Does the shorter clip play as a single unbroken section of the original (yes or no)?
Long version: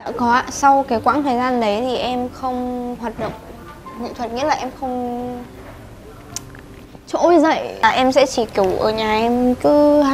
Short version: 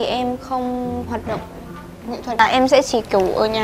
no